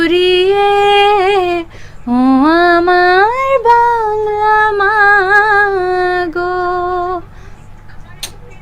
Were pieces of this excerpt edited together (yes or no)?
no